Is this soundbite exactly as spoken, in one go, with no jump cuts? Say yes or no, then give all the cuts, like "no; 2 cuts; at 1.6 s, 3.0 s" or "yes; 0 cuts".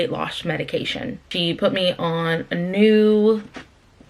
no; 1 cut; at 1.2 s